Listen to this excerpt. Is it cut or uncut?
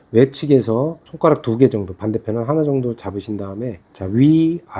cut